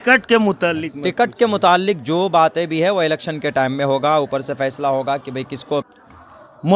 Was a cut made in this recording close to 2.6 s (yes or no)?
no